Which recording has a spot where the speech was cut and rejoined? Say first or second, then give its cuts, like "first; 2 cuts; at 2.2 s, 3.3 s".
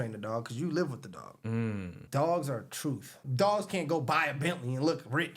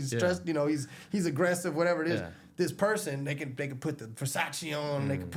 first; 2 cuts; at 2.0 s, 3.3 s